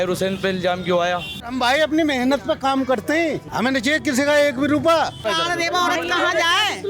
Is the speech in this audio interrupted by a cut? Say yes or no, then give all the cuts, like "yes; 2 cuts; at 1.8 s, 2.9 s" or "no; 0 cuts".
yes; 3 cuts; at 1.5 s, 3.4 s, 5.2 s